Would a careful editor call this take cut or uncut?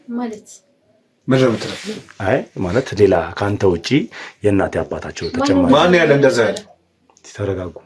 uncut